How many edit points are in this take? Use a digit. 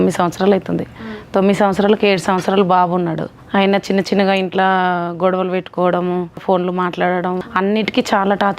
3